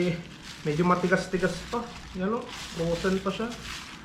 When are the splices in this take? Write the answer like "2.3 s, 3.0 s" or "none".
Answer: none